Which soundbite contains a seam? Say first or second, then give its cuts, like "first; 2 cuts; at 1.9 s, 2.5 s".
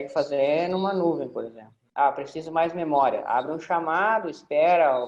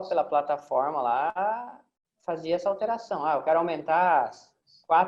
first; 1 cut; at 1.8 s